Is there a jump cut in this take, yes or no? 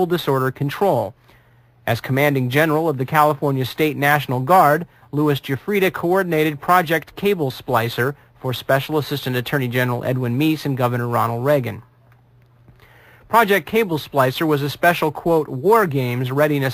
no